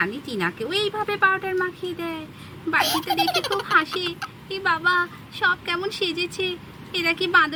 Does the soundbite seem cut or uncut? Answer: uncut